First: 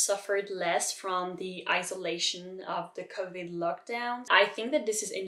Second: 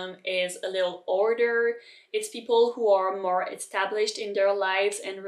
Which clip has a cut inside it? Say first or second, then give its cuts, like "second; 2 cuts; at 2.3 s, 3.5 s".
first; 1 cut; at 4.2 s